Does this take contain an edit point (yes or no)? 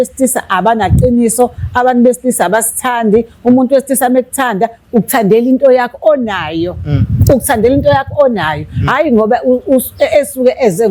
no